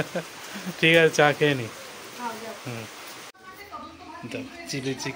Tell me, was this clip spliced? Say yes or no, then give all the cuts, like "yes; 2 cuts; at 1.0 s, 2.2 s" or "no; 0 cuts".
no; 0 cuts